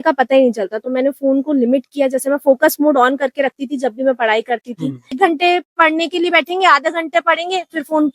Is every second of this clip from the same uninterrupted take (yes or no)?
no